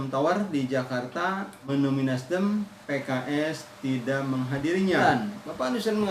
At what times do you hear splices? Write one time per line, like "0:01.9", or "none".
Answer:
0:01.7
0:02.8
0:05.0